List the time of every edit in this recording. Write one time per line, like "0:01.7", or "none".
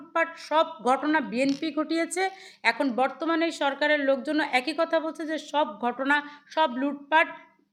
none